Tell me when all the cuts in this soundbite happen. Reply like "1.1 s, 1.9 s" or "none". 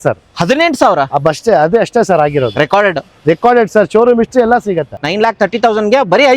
5.0 s